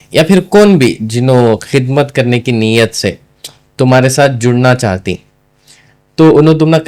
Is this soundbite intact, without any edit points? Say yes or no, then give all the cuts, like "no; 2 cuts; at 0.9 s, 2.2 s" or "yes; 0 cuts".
yes; 0 cuts